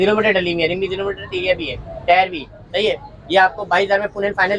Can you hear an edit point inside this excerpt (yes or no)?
no